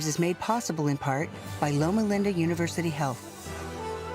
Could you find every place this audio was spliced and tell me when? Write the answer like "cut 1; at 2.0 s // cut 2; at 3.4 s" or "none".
cut 1; at 3.2 s